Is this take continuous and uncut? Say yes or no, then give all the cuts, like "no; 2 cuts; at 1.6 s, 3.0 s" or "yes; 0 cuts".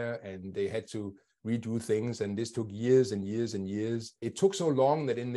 no; 1 cut; at 4.3 s